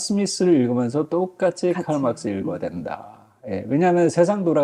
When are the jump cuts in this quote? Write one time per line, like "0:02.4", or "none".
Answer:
none